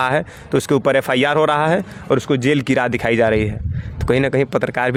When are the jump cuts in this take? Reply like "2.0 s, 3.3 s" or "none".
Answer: none